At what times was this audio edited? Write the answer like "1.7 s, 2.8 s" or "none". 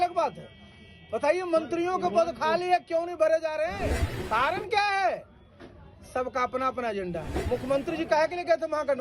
4.1 s, 7.3 s